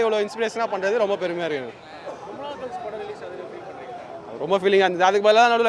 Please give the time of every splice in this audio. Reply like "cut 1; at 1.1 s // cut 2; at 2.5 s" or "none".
none